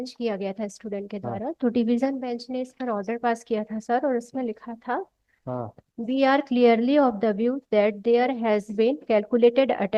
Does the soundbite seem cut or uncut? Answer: uncut